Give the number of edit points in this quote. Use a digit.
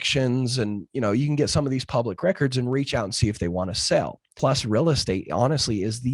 1